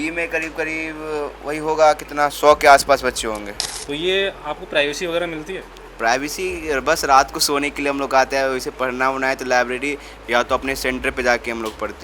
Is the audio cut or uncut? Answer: cut